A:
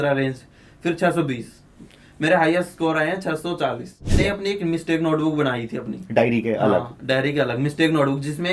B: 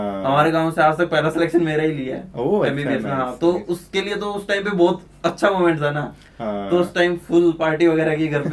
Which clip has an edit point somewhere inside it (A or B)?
A